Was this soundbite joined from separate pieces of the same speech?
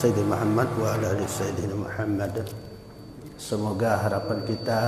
no; 0 cuts

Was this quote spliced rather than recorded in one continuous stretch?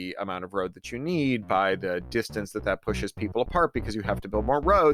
no; 0 cuts

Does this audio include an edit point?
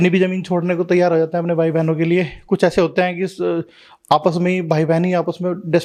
no; 0 cuts

